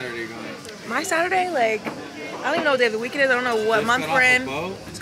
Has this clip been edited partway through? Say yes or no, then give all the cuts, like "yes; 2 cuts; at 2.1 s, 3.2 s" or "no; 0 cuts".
no; 0 cuts